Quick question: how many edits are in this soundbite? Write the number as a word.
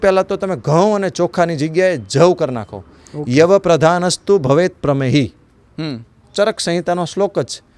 zero